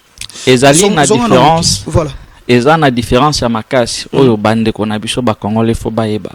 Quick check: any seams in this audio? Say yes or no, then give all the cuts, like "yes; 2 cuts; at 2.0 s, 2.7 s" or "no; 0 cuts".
no; 0 cuts